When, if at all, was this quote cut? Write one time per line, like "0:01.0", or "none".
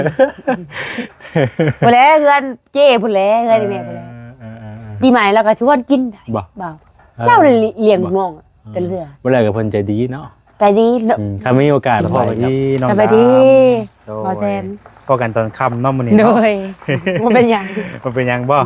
0:12.2